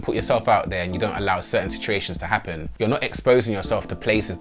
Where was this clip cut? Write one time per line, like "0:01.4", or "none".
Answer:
none